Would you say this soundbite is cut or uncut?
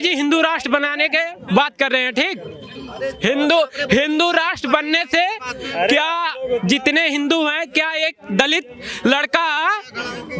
uncut